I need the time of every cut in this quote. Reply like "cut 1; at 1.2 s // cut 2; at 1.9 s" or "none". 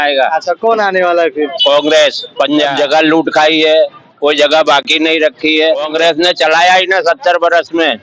cut 1; at 2.7 s // cut 2; at 5.9 s